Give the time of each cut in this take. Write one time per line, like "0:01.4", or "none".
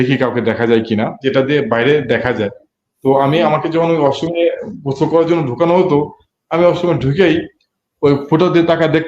0:01.2